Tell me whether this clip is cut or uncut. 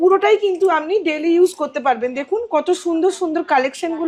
uncut